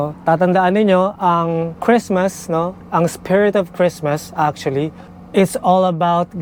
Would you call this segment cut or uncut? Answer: uncut